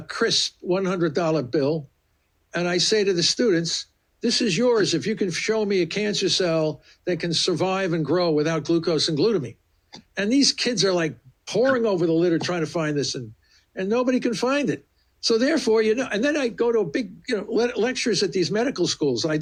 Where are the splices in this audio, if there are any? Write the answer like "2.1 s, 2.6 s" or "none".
none